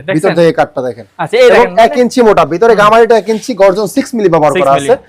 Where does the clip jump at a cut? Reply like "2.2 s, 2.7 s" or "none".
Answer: none

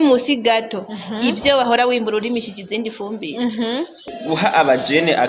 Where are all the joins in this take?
4.1 s

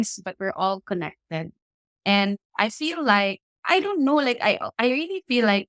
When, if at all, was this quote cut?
3.5 s, 4.7 s

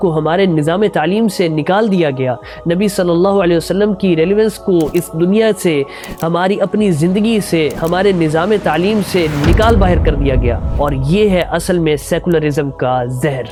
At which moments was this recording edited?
none

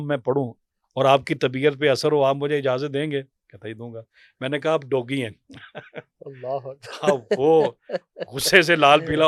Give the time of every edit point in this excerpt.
none

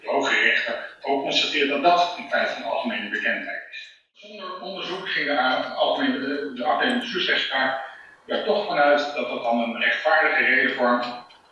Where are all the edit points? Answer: 4.2 s

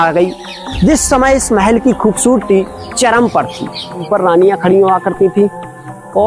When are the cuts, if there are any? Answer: 4.1 s

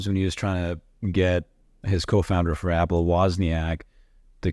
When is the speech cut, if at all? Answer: none

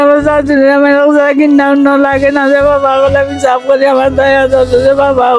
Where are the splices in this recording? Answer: none

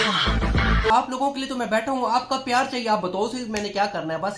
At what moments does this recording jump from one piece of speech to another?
0.9 s

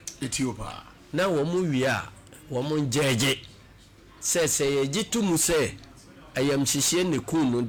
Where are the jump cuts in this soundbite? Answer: none

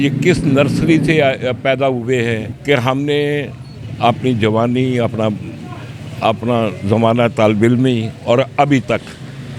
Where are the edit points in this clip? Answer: 2.5 s

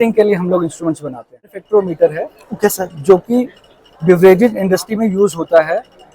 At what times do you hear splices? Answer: 1.5 s

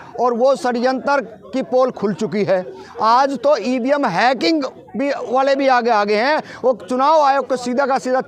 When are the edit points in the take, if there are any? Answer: none

